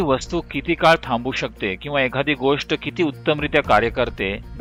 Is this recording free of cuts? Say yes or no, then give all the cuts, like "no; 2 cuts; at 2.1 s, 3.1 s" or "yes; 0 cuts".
yes; 0 cuts